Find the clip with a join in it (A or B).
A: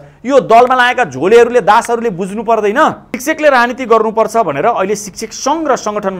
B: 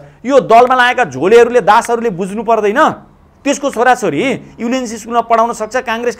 A